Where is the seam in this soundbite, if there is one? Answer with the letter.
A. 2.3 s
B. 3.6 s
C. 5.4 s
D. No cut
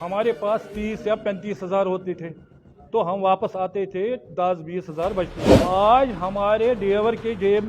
C